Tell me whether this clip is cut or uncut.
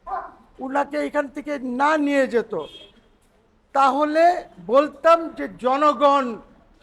uncut